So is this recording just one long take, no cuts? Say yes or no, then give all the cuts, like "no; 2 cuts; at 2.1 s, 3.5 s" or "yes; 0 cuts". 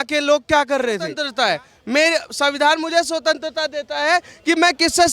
no; 1 cut; at 1.2 s